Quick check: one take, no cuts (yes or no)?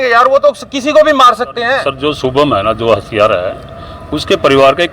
no